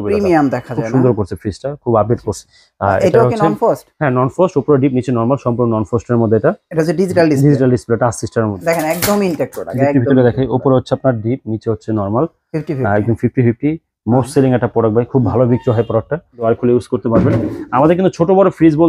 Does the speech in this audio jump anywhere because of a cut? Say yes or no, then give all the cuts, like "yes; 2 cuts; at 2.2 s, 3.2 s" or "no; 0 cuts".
yes; 3 cuts; at 2.4 s, 8.6 s, 16.5 s